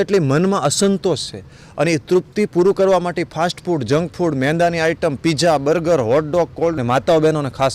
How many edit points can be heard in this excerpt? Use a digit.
1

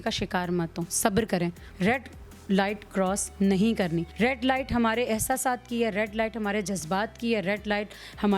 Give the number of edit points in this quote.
2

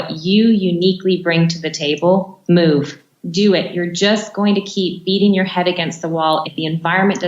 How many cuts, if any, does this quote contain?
3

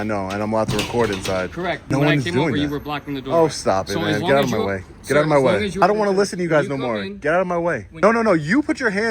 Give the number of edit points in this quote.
3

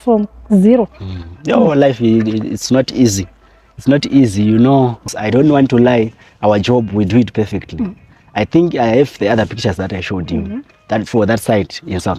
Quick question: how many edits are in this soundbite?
0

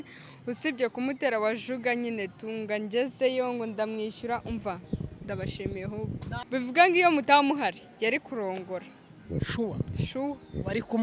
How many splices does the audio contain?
1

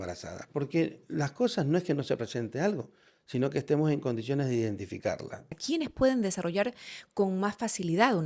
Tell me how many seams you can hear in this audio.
1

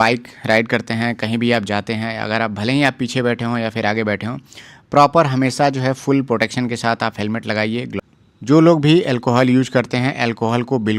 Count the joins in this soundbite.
1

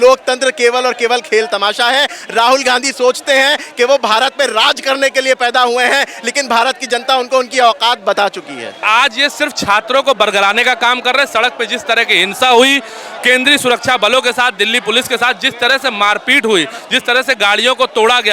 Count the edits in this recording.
1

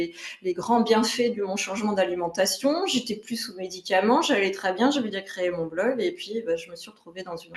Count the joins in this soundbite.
0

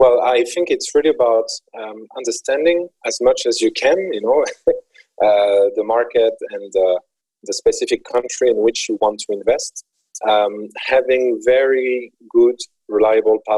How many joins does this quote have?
0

